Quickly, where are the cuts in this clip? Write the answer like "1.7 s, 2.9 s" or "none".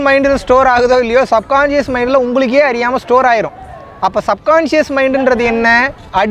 none